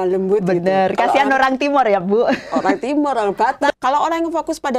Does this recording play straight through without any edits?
no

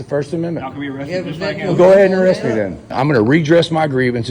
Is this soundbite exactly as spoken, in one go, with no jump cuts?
no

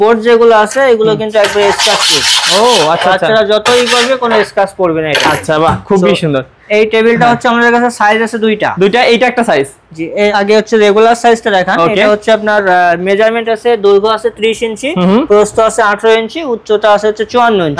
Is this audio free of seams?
yes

